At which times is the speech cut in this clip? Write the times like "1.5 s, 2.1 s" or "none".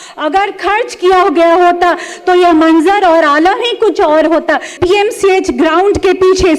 4.8 s